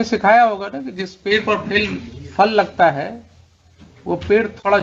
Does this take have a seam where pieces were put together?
no; 0 cuts

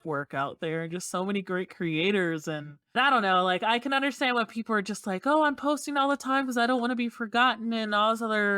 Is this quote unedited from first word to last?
no; 1 cut; at 2.8 s

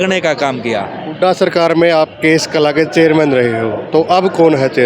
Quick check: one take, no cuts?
yes; 0 cuts

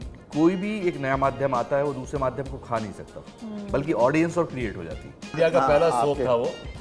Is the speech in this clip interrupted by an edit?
yes; 1 cut; at 5.3 s

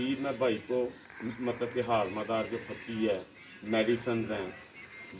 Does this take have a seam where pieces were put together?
no; 0 cuts

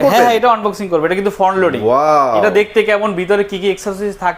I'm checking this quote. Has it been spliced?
no; 0 cuts

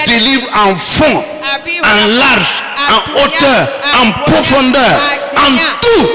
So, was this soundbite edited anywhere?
no; 0 cuts

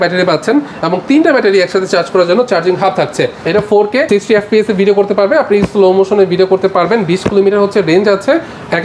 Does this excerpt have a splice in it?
yes; 1 cut; at 3.4 s

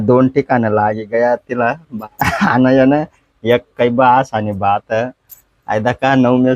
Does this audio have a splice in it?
yes; 1 cut; at 1.9 s

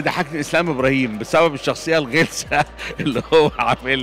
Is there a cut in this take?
no; 0 cuts

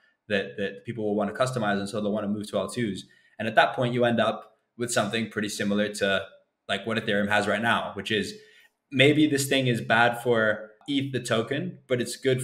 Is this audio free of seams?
no; 1 cut; at 10.8 s

